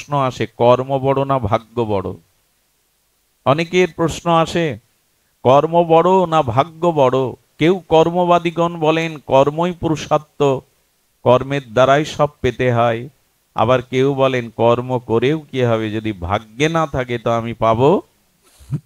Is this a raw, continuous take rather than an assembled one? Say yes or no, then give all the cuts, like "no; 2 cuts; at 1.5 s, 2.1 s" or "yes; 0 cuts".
yes; 0 cuts